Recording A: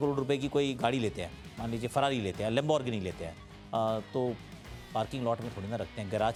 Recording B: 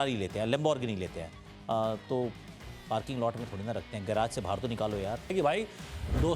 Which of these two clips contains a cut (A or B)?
B